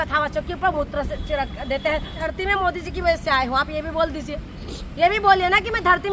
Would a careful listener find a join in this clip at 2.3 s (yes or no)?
yes